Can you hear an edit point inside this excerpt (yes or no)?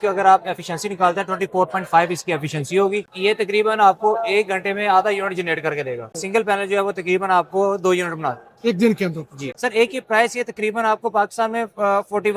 yes